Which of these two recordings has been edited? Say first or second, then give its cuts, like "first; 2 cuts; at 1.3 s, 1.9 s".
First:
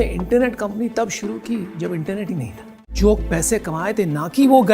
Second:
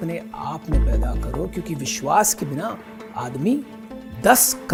first; 1 cut; at 2.9 s